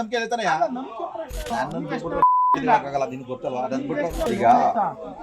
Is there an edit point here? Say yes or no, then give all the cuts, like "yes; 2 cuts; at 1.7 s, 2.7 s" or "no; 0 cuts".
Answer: yes; 2 cuts; at 1.4 s, 4.3 s